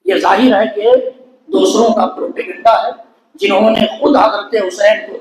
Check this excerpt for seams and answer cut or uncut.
uncut